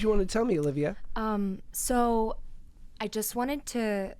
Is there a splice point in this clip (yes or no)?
no